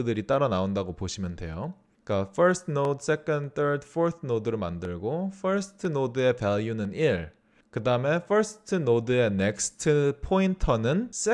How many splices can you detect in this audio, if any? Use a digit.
0